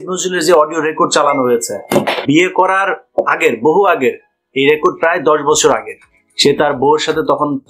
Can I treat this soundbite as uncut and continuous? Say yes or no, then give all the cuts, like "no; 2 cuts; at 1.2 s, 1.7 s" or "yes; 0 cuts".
no; 1 cut; at 2.2 s